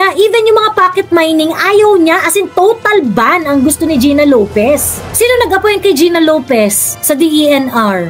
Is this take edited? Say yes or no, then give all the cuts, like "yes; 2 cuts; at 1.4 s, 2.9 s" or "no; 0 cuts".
yes; 1 cut; at 5.1 s